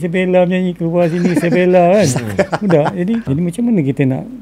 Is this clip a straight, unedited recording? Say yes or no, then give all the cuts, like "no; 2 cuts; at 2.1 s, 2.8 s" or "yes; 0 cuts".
no; 1 cut; at 3.3 s